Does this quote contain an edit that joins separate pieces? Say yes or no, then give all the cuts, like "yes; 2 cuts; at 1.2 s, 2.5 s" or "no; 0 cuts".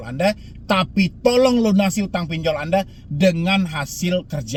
no; 0 cuts